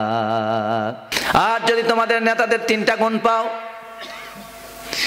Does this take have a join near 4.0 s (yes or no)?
no